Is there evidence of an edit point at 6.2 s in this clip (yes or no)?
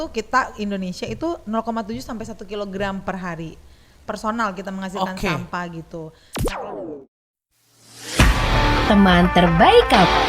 yes